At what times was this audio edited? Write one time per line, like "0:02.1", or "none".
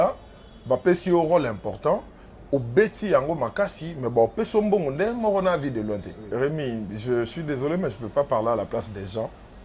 0:06.2